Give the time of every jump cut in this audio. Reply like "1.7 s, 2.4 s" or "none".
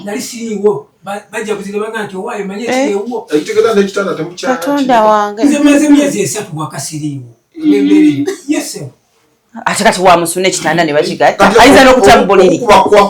none